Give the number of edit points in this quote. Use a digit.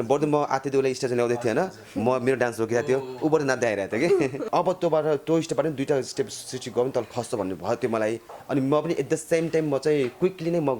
1